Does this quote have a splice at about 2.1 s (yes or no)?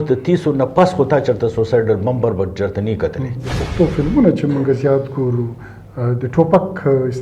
no